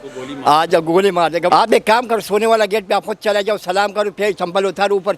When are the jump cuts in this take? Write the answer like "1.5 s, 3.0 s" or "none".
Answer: 1.5 s